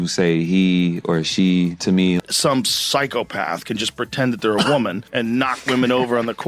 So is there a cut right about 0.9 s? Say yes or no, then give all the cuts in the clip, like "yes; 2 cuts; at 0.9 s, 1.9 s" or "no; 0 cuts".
no; 1 cut; at 2.1 s